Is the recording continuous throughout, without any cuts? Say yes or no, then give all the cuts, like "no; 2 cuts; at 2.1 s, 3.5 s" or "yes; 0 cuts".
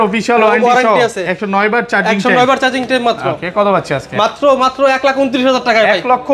yes; 0 cuts